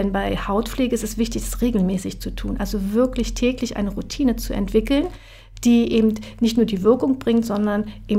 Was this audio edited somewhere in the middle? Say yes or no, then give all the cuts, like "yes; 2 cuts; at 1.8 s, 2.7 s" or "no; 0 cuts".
no; 0 cuts